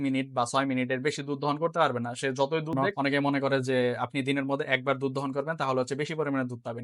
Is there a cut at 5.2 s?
no; 1 cut; at 2.8 s

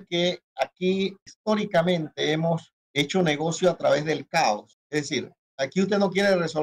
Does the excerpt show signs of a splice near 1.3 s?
yes; 3 cuts; at 1.3 s, 2.8 s, 5.2 s

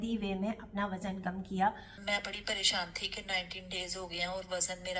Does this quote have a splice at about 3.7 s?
no; 1 cut; at 1.9 s

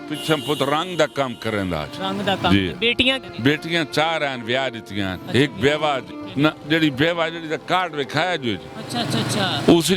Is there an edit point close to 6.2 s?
yes; 2 cuts; at 3.3 s, 6.2 s

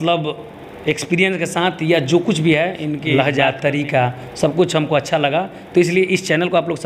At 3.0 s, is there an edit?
yes; 1 cut; at 3.0 s

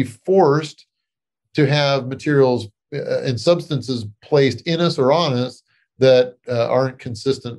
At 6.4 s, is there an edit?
yes; 1 cut; at 6.4 s

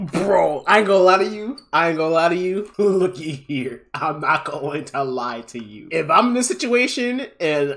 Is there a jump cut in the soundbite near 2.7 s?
yes; 2 cuts; at 2.7 s, 5.9 s

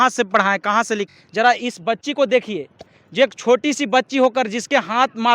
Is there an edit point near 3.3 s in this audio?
no; 1 cut; at 1.1 s

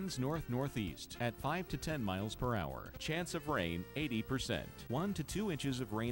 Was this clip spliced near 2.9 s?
yes; 2 cuts; at 1.0 s, 2.9 s

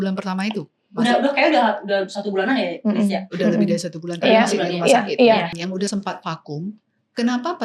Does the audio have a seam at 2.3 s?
no; 1 cut; at 5.5 s

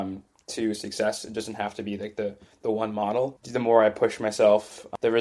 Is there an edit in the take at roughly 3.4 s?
yes; 1 cut; at 3.4 s

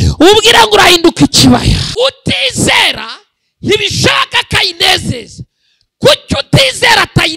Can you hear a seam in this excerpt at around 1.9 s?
yes; 1 cut; at 1.9 s

